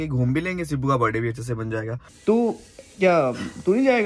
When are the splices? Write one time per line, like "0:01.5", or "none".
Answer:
0:02.0